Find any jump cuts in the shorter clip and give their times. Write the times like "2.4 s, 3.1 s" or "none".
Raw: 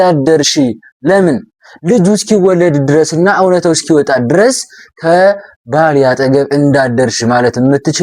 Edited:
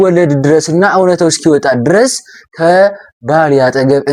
none